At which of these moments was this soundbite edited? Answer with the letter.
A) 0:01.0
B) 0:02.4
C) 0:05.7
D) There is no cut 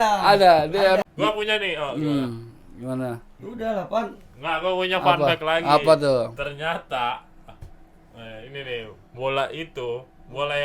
A